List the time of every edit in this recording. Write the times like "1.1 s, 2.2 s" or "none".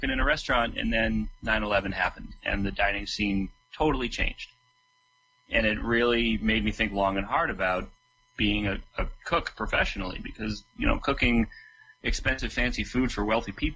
none